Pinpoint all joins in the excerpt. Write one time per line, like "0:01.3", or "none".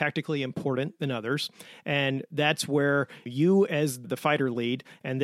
0:03.2
0:04.0